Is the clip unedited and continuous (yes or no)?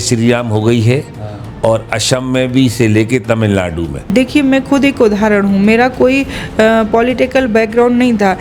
no